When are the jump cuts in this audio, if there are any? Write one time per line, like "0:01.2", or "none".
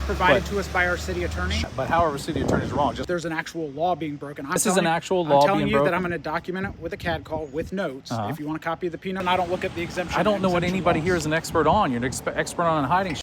0:01.6
0:03.0
0:04.6
0:09.2